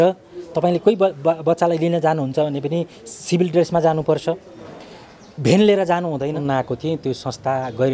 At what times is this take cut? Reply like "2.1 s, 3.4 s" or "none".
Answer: 6.4 s